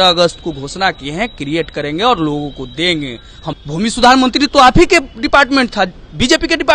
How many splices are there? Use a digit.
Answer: 1